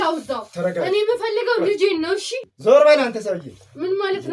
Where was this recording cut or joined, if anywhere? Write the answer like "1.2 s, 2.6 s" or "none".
2.3 s